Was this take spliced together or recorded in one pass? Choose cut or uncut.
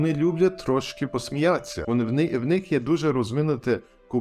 cut